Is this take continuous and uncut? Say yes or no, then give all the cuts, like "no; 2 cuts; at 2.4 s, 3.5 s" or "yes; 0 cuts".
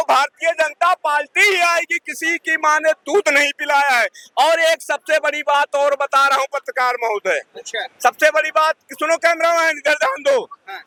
yes; 0 cuts